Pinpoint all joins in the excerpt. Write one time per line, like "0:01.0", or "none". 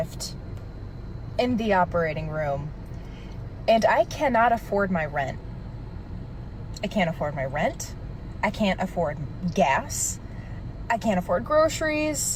none